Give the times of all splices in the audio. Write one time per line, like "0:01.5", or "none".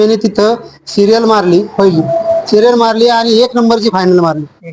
none